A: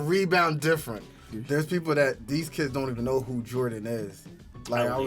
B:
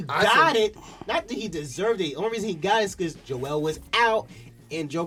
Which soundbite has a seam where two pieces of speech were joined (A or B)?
A